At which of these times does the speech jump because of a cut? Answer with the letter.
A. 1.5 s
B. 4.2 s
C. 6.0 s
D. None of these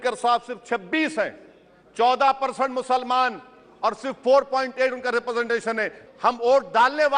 C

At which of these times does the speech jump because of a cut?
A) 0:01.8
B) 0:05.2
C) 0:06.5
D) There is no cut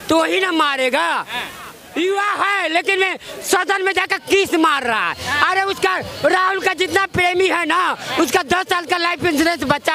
A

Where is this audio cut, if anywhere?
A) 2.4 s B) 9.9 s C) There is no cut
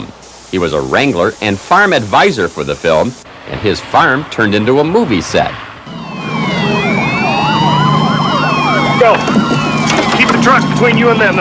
A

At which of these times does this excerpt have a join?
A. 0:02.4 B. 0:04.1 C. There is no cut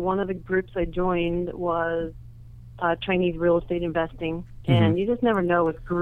C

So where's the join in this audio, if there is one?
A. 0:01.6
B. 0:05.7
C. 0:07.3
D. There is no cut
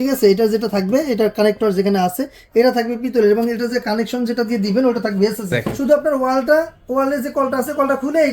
B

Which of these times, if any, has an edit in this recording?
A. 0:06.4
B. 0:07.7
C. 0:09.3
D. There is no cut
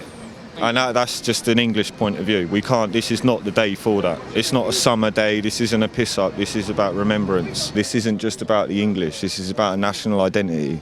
B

